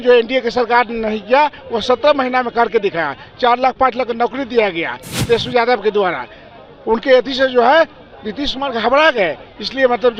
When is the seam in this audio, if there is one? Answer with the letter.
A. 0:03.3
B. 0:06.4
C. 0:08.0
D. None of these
D